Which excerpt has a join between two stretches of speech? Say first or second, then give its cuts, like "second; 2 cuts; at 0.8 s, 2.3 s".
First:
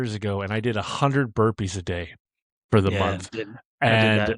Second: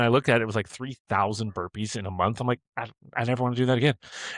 first; 1 cut; at 3.3 s